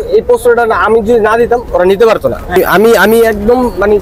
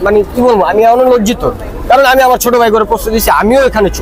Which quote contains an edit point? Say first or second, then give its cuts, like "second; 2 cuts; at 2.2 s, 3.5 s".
first; 1 cut; at 2.6 s